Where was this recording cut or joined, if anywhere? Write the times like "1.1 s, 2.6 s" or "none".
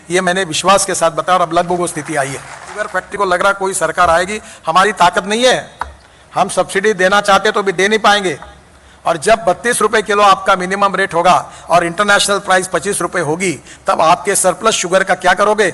3.1 s